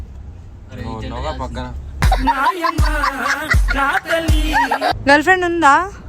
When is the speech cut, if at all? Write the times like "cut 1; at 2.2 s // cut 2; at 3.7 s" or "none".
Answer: cut 1; at 5.0 s